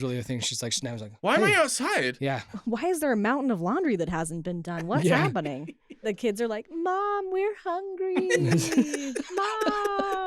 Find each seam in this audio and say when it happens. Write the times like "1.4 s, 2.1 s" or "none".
1.1 s, 2.6 s, 6.1 s